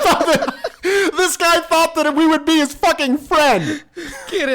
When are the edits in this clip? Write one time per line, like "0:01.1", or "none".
0:03.7